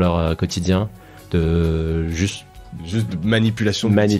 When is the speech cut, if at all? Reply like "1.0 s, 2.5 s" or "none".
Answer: none